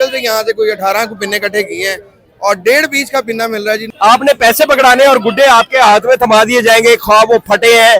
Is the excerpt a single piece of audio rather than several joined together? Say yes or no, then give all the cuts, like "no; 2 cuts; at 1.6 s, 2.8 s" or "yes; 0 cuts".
no; 1 cut; at 3.9 s